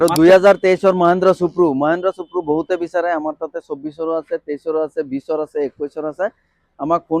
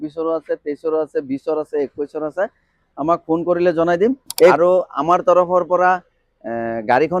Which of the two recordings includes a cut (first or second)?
second